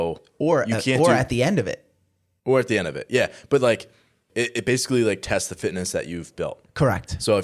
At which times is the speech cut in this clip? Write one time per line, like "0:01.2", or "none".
0:04.3